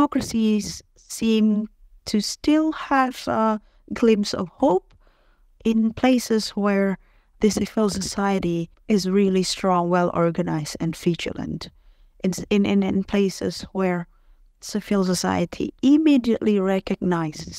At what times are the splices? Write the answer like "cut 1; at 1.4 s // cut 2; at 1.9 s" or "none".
none